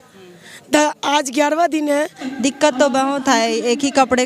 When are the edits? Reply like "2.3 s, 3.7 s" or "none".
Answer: 2.2 s